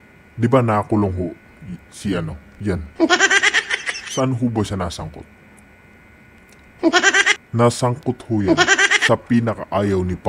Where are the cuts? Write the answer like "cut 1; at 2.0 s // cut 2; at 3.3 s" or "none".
cut 1; at 7.4 s